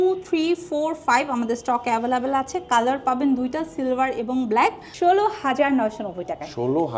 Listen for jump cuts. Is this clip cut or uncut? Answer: cut